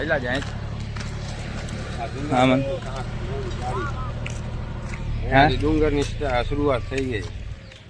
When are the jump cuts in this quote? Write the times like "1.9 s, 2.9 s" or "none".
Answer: none